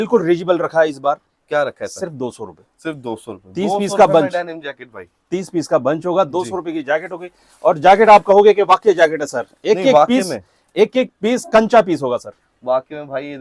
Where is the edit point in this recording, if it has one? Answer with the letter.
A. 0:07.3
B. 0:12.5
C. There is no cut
C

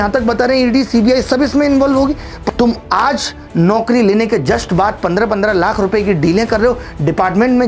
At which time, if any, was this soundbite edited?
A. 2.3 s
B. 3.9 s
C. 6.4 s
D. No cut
A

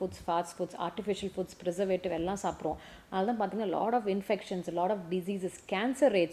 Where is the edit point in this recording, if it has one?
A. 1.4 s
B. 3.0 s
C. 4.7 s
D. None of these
D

